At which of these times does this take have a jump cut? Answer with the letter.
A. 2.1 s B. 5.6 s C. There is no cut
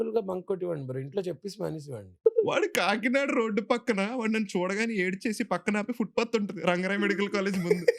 A